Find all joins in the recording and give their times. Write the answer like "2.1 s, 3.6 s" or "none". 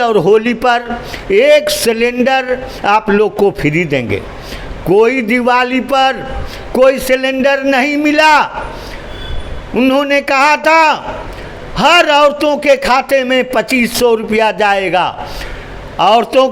none